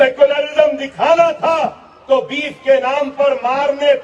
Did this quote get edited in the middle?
no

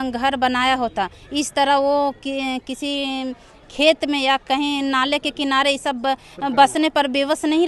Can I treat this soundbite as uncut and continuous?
yes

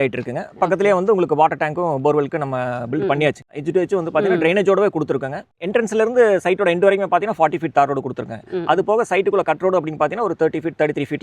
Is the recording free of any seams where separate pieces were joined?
no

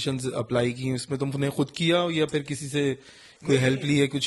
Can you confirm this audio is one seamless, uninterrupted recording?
yes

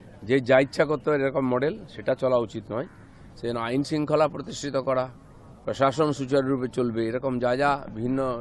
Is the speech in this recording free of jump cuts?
yes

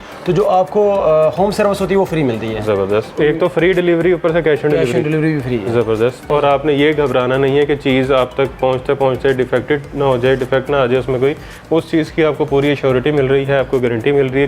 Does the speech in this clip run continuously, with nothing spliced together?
no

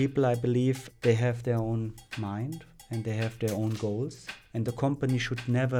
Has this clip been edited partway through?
yes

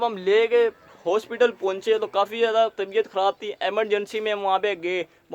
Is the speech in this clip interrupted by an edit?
no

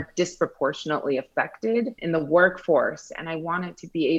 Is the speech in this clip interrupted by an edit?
yes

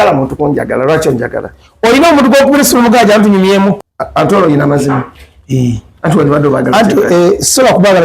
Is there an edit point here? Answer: yes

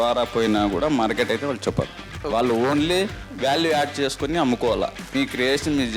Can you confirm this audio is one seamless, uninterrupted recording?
no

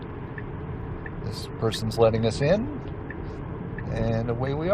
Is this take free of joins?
yes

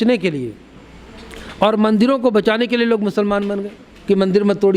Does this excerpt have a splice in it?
no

